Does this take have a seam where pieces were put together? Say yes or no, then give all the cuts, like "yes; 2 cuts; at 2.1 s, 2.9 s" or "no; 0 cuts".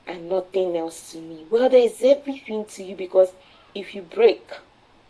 yes; 1 cut; at 3.5 s